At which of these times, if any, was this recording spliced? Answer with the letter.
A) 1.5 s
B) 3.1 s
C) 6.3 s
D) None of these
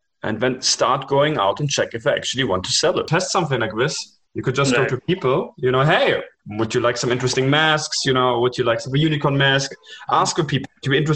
B